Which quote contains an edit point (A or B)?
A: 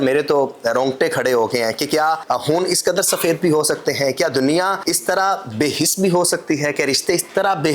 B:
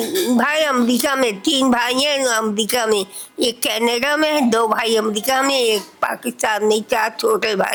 A